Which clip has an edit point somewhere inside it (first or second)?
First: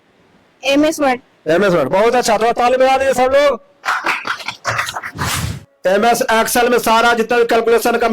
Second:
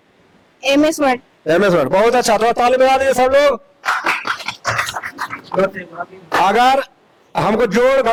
first